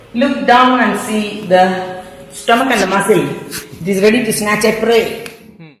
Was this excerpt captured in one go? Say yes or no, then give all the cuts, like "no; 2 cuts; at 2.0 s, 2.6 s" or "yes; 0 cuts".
yes; 0 cuts